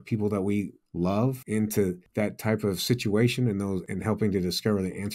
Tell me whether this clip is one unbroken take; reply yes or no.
no